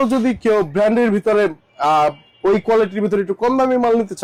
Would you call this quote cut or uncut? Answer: uncut